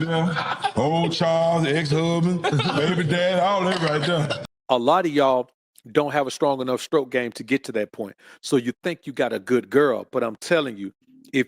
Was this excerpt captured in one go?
no; 1 cut; at 4.4 s

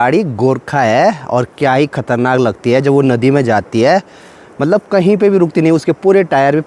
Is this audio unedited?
yes; 0 cuts

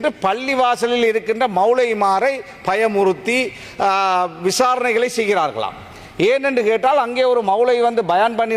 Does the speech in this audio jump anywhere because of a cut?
no; 0 cuts

